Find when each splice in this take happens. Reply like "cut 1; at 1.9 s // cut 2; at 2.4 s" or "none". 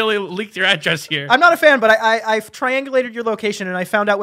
none

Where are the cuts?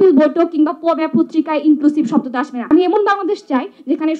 cut 1; at 2.6 s

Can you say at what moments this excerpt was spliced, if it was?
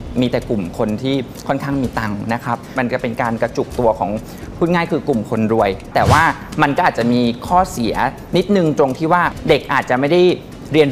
cut 1; at 2.7 s // cut 2; at 5.9 s // cut 3; at 9.3 s

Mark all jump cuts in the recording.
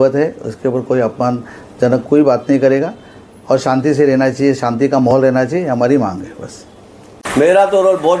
cut 1; at 7.2 s

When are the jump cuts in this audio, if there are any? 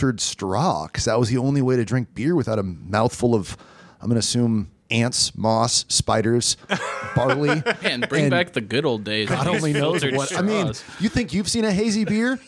cut 1; at 4.8 s

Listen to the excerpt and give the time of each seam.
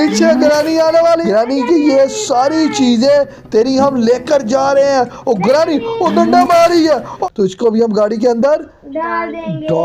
cut 1; at 1.2 s // cut 2; at 7.1 s

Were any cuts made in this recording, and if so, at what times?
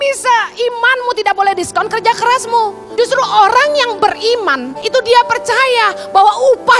cut 1; at 2.8 s // cut 2; at 4.7 s

